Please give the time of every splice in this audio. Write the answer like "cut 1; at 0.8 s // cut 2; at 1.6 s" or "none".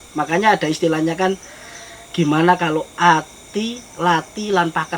none